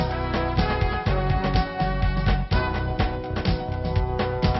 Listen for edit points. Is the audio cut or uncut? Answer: cut